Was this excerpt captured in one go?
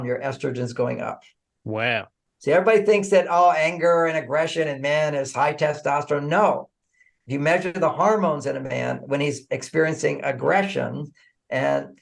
no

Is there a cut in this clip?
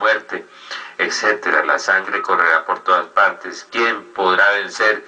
no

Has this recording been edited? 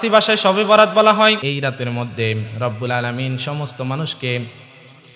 yes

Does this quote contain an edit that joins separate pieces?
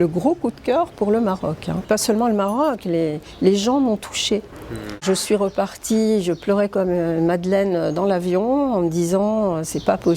yes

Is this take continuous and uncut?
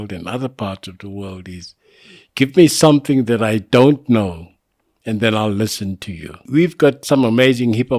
no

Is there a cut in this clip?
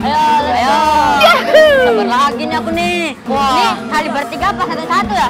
yes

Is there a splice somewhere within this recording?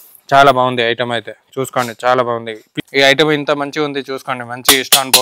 yes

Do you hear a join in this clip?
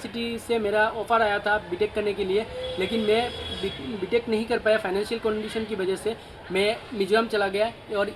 no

